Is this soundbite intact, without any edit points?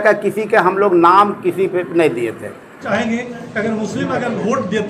no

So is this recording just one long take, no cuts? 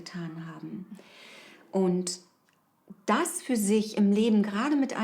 yes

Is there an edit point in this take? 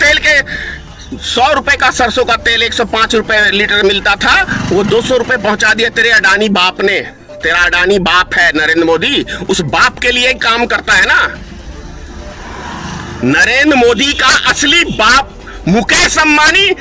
no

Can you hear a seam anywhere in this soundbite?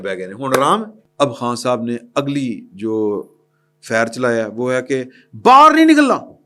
yes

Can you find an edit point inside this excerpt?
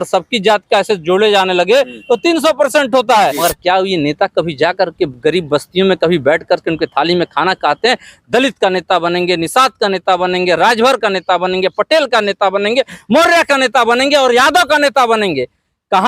yes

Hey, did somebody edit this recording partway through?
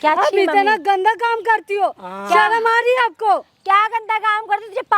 no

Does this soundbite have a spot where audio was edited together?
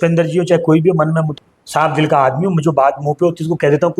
yes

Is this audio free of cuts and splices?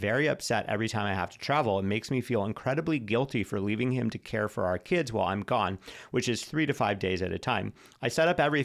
yes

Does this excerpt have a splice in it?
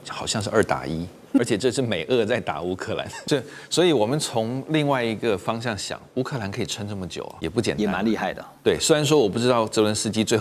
yes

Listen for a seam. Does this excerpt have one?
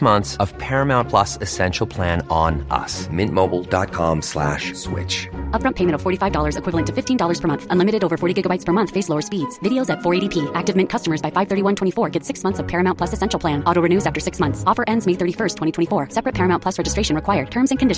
no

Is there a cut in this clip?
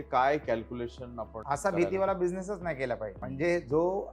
yes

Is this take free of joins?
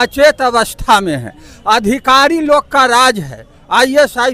yes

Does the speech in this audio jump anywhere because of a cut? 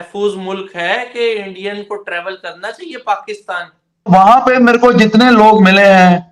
yes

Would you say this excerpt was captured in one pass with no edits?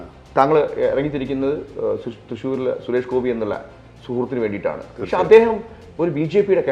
yes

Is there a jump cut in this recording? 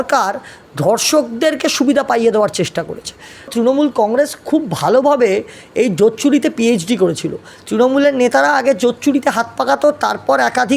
yes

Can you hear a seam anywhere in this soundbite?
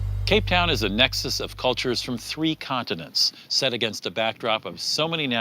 yes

